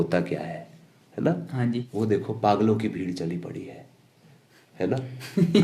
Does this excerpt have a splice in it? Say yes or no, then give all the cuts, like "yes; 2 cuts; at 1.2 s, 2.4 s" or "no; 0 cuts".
yes; 1 cut; at 1.9 s